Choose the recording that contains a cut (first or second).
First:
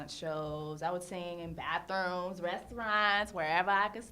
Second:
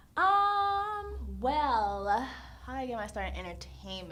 first